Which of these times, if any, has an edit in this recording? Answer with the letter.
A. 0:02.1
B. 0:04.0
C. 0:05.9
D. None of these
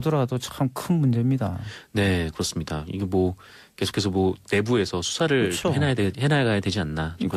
D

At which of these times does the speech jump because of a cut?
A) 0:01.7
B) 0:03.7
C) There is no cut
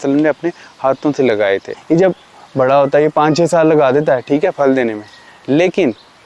A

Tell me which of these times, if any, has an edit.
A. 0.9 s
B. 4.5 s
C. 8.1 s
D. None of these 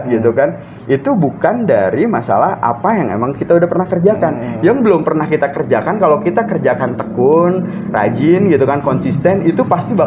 D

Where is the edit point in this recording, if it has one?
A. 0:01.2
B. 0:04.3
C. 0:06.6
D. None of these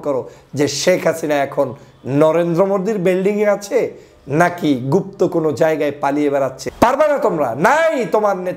C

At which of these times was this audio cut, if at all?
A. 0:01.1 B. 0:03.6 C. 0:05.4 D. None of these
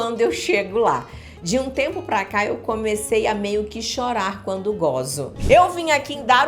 C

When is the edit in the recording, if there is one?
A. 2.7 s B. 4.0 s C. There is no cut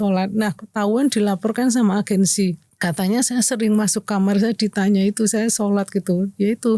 A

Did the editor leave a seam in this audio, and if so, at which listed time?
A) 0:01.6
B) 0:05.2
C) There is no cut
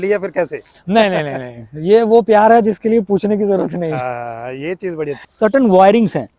B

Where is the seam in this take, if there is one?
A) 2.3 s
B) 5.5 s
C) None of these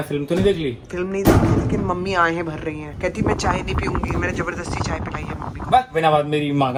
C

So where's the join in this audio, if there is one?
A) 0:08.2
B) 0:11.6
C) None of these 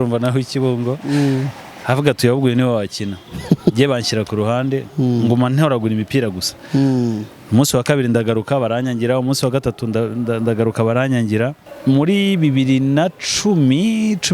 B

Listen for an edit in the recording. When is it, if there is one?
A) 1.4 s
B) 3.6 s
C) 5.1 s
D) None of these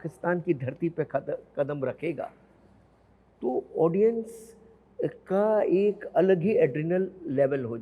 D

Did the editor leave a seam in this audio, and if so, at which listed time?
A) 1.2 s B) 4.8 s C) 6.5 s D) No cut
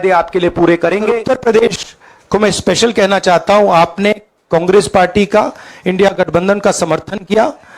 A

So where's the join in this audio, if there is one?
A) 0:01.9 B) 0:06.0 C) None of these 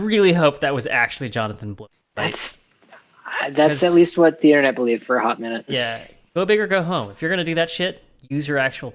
A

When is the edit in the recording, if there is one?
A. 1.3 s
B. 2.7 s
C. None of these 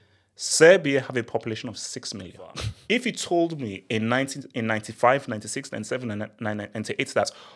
B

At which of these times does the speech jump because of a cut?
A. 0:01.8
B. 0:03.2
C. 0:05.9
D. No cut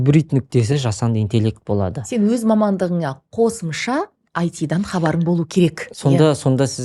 C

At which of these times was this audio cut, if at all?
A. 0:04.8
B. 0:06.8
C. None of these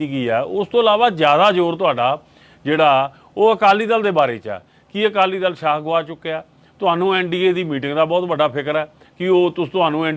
C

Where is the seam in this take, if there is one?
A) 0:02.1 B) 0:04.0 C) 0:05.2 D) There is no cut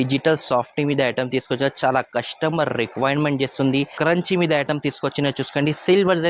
B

